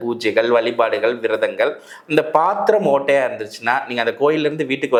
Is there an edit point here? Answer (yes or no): no